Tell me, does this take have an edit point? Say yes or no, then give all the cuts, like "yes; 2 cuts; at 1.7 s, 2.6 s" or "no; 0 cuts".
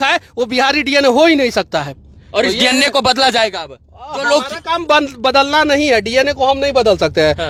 no; 0 cuts